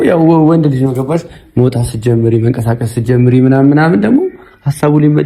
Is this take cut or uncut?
uncut